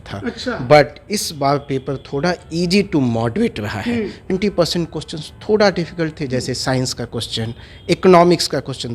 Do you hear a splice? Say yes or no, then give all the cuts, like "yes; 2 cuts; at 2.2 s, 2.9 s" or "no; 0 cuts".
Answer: yes; 1 cut; at 4.3 s